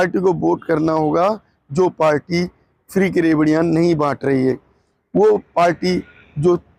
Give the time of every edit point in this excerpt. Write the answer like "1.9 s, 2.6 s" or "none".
none